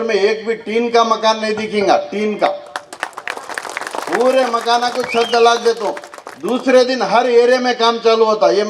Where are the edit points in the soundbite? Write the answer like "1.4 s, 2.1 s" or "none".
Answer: none